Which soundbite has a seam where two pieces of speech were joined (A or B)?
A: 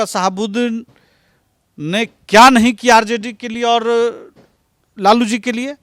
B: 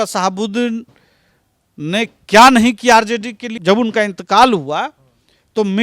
B